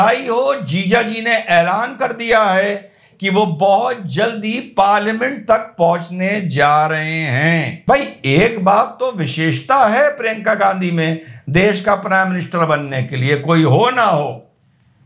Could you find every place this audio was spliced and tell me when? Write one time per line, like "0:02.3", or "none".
0:07.7